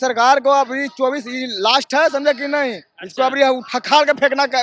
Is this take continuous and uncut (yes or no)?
yes